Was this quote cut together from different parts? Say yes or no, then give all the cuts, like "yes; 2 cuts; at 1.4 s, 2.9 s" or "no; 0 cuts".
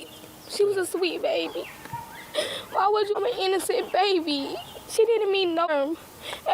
yes; 2 cuts; at 3.1 s, 5.7 s